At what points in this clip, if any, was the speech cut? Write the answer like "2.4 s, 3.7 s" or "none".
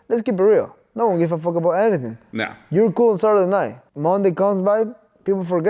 3.8 s